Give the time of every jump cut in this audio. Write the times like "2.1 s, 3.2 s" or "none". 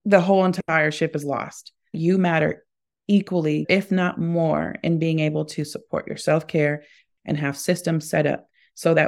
1.9 s, 3.6 s